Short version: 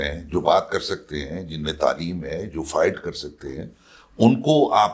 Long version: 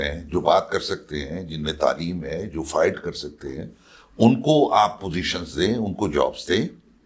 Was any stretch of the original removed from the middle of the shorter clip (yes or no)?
no